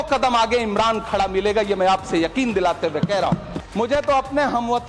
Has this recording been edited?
yes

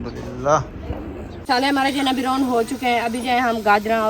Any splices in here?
yes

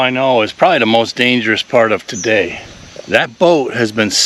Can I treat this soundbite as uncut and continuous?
yes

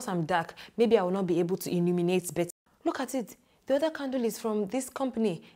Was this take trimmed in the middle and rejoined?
yes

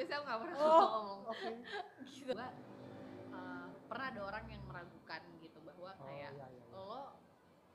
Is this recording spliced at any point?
yes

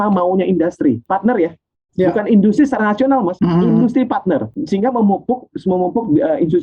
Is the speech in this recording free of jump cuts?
no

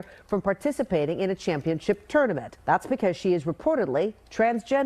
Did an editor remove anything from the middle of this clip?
yes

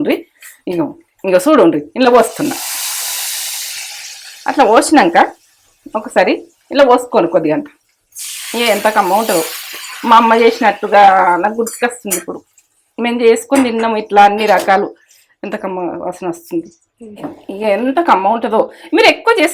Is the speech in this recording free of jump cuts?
no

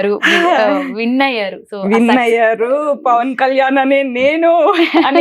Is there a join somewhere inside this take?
no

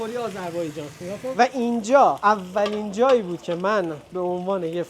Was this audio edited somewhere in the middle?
yes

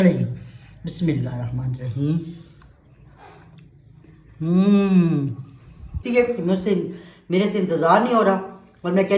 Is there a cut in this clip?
yes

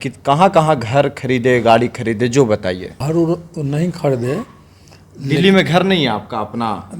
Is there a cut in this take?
yes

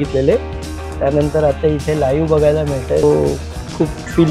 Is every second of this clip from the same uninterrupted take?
no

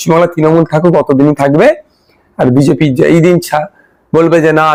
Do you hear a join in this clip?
no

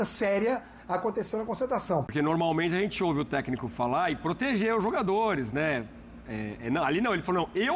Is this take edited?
yes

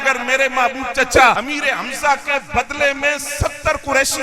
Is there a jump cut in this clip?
yes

